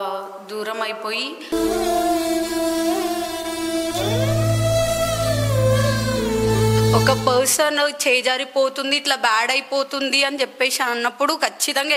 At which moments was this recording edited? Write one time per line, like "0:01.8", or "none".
0:07.0